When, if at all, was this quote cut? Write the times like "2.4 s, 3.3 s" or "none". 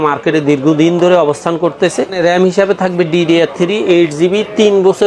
2.2 s